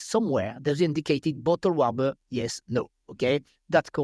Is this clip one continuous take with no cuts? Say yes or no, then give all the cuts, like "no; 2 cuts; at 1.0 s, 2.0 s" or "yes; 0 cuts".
yes; 0 cuts